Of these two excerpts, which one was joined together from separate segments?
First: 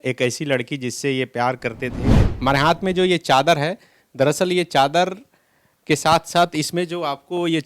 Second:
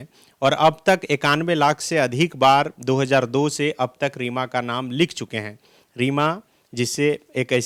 first; 1 cut; at 2.2 s

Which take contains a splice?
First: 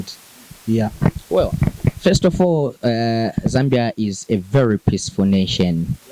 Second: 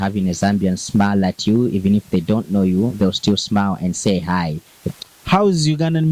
second; 1 cut; at 4.8 s

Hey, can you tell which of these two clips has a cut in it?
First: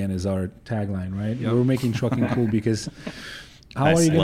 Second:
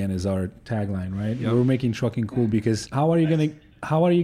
second; 1 cut; at 2.9 s

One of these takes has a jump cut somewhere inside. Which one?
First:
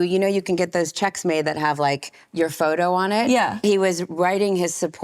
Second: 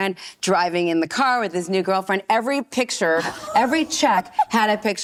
first; 1 cut; at 3.6 s

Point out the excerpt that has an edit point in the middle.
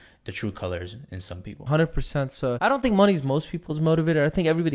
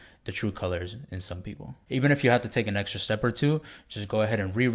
second; 1 cut; at 1.6 s

